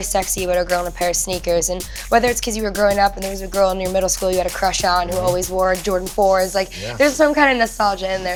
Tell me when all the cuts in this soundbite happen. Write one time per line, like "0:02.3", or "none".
none